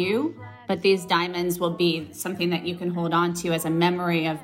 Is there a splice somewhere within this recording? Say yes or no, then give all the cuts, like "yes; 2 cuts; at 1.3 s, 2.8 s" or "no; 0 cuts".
no; 0 cuts